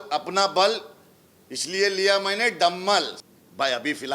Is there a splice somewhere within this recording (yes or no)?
yes